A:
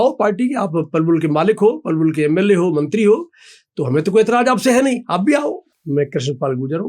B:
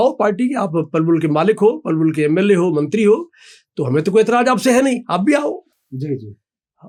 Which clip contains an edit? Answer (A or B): A